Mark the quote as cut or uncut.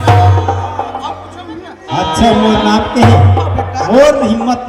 cut